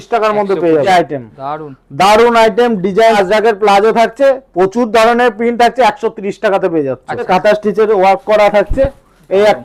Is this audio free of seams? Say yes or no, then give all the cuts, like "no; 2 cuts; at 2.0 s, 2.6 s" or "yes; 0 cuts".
no; 3 cuts; at 0.8 s, 3.2 s, 7.2 s